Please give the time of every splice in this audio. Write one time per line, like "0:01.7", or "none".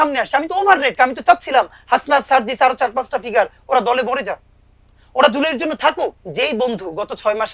0:00.9
0:06.2